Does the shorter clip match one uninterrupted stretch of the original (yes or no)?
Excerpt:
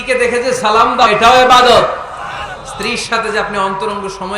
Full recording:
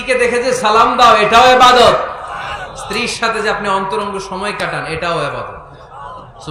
no